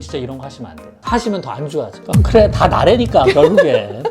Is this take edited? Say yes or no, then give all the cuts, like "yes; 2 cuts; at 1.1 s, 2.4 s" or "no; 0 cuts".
yes; 1 cut; at 2.0 s